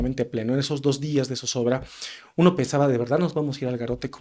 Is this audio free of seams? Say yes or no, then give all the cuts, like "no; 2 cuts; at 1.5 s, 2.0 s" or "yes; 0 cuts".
yes; 0 cuts